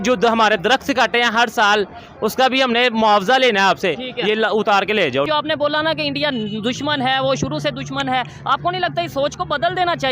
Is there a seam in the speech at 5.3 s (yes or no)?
yes